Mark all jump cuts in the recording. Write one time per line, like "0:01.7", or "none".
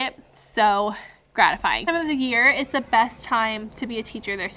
0:01.8